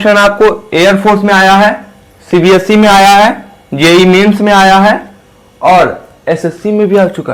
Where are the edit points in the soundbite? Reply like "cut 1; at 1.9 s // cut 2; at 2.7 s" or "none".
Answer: none